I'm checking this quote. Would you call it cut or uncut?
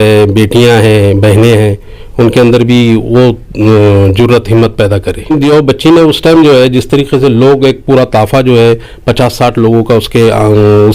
cut